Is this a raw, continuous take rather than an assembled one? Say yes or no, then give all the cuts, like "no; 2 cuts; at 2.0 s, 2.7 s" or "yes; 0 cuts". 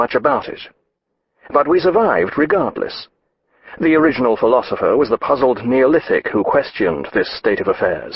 no; 1 cut; at 5.6 s